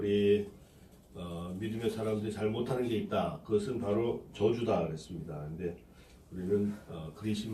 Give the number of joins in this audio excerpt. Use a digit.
1